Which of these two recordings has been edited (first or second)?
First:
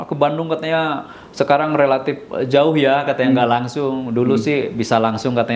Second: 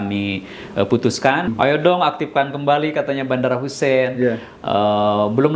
second